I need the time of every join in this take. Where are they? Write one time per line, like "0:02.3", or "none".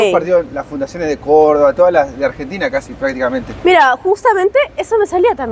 none

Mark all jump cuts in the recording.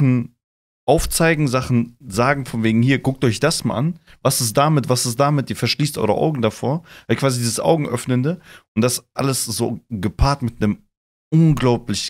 none

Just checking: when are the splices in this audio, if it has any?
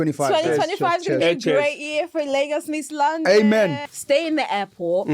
0:03.8

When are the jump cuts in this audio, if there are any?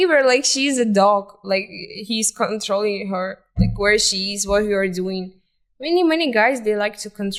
none

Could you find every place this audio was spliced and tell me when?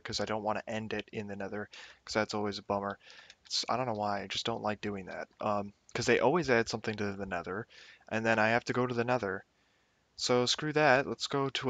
0:10.5

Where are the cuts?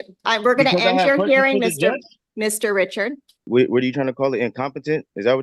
0:03.5

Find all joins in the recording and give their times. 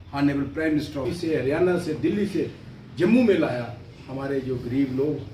0:01.1

